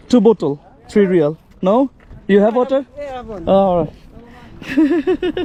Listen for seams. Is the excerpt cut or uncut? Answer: uncut